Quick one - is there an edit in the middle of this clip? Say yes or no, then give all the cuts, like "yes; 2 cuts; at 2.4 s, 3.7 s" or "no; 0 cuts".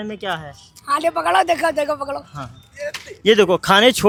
no; 0 cuts